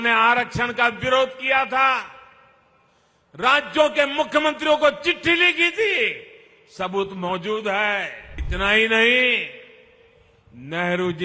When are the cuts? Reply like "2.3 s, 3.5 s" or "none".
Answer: 8.4 s

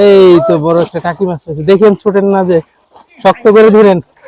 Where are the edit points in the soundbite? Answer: none

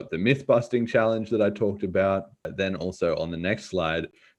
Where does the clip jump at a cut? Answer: 2.5 s

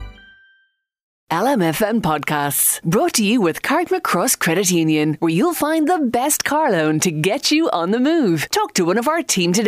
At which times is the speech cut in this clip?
1.2 s

